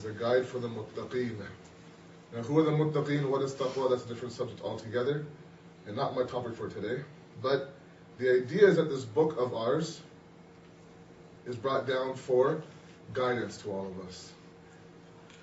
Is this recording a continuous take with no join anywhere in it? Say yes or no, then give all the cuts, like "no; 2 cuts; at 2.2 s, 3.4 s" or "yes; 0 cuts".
no; 1 cut; at 3.1 s